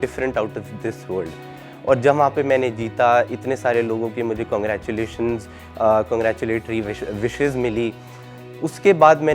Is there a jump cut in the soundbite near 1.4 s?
no; 0 cuts

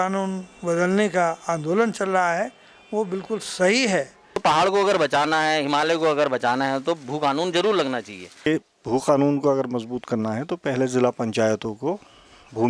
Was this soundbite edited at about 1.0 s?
no; 2 cuts; at 4.4 s, 8.5 s

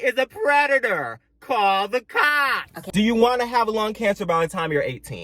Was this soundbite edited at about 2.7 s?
yes; 1 cut; at 2.7 s

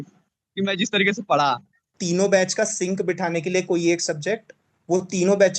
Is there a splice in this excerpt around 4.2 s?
no; 1 cut; at 2.0 s

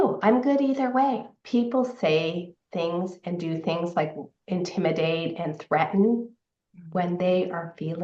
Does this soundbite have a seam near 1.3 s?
yes; 1 cut; at 1.3 s

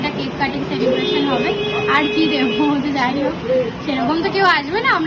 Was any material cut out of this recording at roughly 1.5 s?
no; 0 cuts

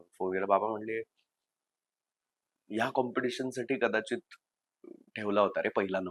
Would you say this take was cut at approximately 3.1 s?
no; 0 cuts

